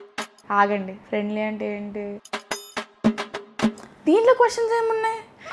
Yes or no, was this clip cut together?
yes